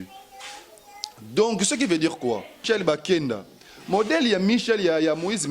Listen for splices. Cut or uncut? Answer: cut